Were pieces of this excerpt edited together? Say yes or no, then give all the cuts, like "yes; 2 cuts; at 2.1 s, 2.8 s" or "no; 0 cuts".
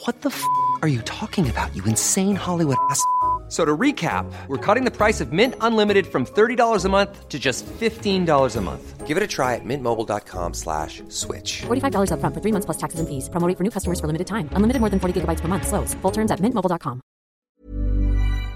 yes; 1 cut; at 17.5 s